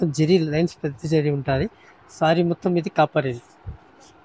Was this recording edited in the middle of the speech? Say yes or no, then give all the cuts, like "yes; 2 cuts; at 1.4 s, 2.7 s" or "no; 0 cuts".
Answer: no; 0 cuts